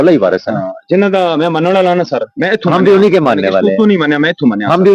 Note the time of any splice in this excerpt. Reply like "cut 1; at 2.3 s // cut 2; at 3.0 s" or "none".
none